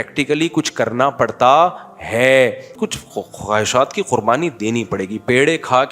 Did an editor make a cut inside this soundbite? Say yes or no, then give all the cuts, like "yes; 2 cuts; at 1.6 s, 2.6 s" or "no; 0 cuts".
yes; 1 cut; at 2.7 s